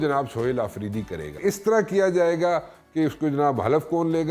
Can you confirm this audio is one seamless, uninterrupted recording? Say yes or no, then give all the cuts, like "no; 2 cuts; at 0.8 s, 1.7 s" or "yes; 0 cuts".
no; 1 cut; at 1.4 s